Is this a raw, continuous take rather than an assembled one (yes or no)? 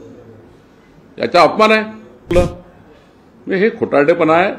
no